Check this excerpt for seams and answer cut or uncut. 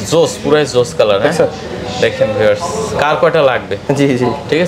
uncut